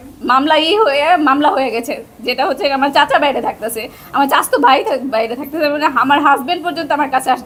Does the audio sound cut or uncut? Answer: uncut